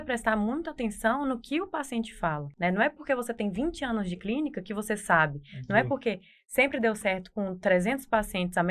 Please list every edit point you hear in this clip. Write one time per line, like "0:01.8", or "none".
0:02.5